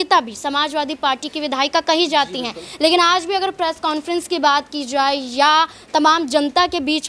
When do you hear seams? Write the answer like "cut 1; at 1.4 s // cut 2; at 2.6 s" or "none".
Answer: none